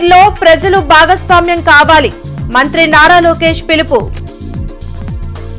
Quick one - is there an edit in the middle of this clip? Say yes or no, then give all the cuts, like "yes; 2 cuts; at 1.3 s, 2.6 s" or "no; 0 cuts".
no; 0 cuts